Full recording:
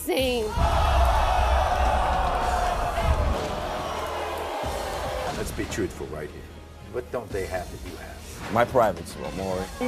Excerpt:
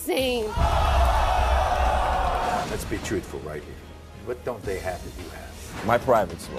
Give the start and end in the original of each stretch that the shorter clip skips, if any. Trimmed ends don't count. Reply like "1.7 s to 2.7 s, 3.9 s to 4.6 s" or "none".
2.6 s to 5.3 s